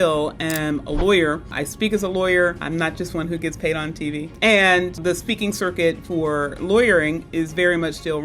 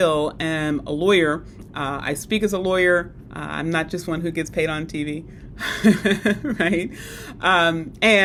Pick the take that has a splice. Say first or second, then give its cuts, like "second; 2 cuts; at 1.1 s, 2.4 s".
first; 4 cuts; at 1.6 s, 2.6 s, 4.3 s, 5.0 s